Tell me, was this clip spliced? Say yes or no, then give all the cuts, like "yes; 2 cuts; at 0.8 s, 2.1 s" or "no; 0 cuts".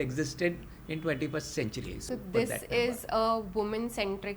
yes; 1 cut; at 2.0 s